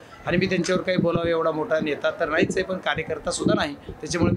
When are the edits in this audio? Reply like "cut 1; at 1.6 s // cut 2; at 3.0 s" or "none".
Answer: none